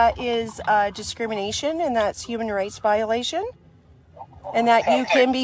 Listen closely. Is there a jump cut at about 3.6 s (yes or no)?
yes